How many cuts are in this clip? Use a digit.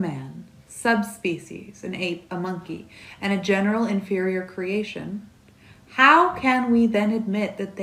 0